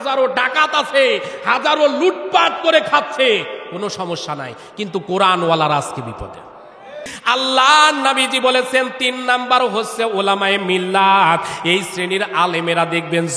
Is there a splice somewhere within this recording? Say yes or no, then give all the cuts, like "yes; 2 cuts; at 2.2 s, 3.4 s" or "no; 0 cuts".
yes; 1 cut; at 7.1 s